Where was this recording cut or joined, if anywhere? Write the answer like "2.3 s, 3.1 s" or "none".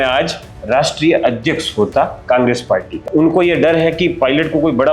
3.0 s